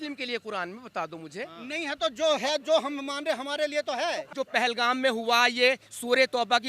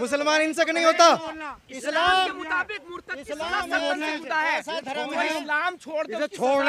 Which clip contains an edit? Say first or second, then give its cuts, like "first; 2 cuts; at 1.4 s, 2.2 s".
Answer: first; 1 cut; at 4.3 s